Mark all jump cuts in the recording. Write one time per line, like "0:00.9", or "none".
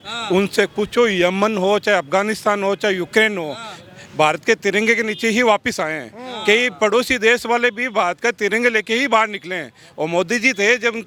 none